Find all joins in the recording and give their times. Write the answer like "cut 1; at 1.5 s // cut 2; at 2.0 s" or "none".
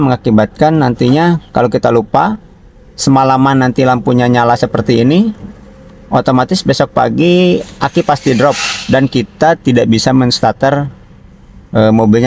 none